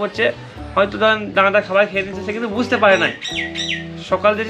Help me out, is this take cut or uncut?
uncut